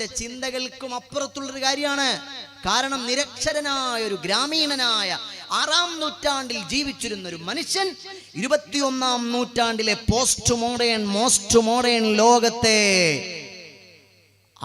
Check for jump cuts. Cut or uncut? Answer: uncut